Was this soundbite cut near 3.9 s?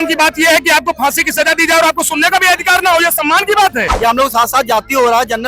yes; 1 cut; at 3.9 s

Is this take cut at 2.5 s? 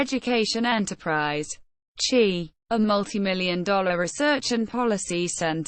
yes; 1 cut; at 2.5 s

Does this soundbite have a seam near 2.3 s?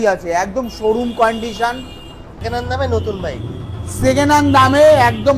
yes; 1 cut; at 2.3 s

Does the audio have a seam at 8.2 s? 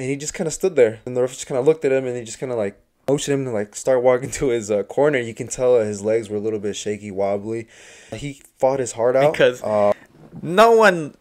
yes; 4 cuts; at 1.0 s, 3.1 s, 8.2 s, 9.9 s

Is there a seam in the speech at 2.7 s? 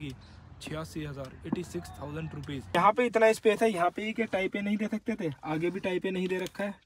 yes; 1 cut; at 2.7 s

